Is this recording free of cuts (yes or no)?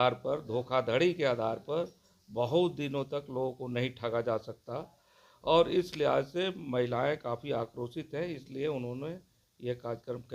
yes